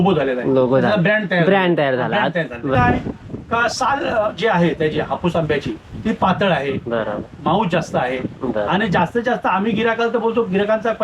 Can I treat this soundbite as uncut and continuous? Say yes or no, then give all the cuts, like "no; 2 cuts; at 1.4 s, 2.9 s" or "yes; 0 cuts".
no; 1 cut; at 2.7 s